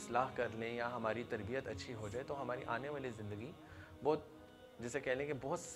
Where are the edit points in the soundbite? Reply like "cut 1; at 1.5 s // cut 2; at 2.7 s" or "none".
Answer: none